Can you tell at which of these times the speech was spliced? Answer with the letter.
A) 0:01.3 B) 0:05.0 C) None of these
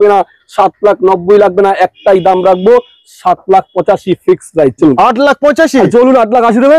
B